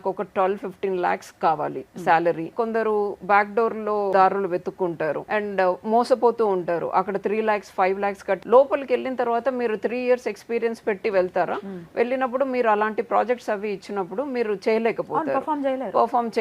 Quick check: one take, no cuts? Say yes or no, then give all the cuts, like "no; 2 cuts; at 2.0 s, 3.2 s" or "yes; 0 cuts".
no; 4 cuts; at 2.5 s, 4.1 s, 5.2 s, 8.4 s